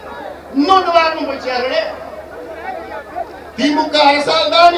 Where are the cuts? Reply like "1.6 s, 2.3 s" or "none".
none